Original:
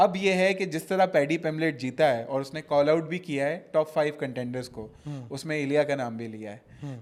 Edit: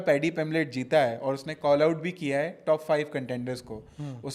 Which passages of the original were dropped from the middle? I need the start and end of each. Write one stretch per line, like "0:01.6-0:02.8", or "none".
none